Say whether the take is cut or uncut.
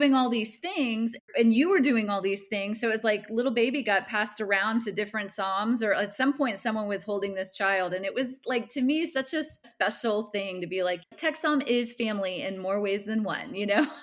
cut